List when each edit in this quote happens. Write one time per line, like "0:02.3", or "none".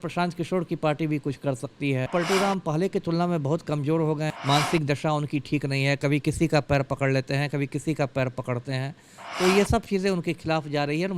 0:02.1
0:04.3